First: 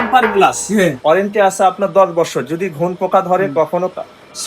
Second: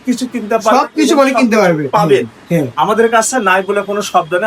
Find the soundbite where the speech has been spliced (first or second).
first